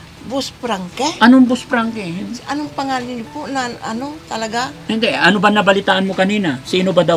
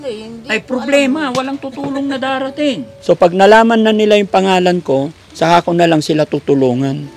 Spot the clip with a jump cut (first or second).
second